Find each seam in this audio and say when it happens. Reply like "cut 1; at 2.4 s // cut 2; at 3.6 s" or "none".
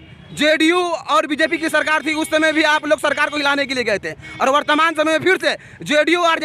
none